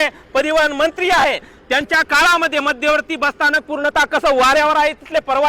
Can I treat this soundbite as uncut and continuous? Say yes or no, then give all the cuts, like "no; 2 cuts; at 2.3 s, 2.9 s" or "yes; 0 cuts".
yes; 0 cuts